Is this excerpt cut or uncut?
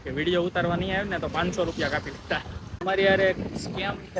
cut